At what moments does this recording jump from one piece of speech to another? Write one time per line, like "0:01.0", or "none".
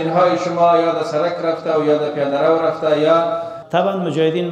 0:03.5